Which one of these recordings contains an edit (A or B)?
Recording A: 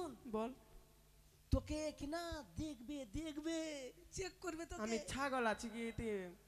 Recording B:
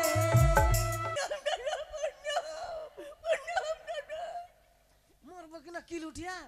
B